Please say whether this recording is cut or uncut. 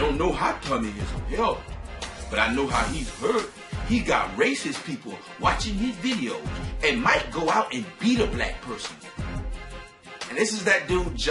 uncut